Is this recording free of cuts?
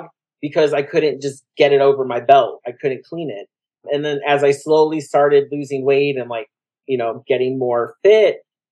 yes; 0 cuts

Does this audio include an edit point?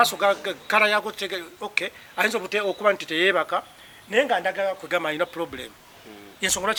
no; 0 cuts

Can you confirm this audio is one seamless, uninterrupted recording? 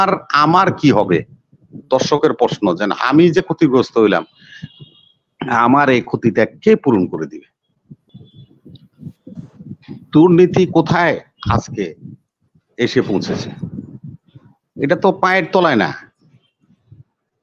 no; 1 cut; at 8.0 s

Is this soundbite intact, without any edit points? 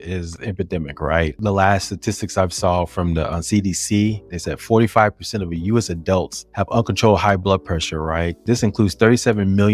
yes; 0 cuts

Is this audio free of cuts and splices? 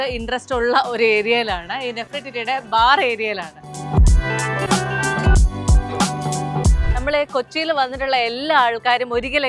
no; 2 cuts; at 3.7 s, 6.8 s

